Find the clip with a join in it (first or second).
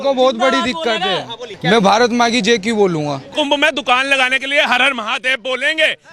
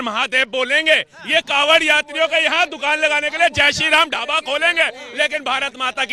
first